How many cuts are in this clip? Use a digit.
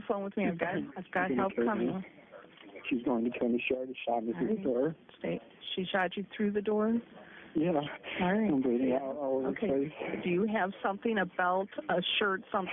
2